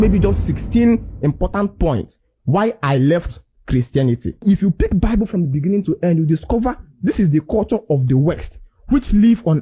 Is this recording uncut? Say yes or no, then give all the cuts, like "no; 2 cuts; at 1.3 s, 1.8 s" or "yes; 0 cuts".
no; 1 cut; at 4.4 s